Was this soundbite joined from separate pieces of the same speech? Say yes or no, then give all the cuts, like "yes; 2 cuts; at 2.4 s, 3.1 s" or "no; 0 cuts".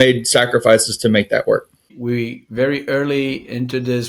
yes; 1 cut; at 1.9 s